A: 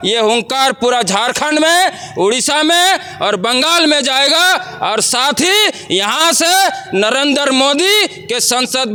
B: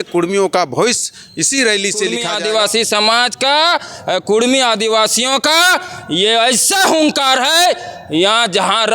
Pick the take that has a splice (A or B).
B